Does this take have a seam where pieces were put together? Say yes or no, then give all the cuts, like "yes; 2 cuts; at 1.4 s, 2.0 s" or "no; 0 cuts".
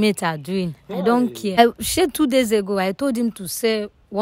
yes; 1 cut; at 1.6 s